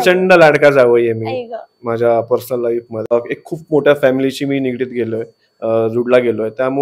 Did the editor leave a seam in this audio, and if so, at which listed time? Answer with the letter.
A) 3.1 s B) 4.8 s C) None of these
A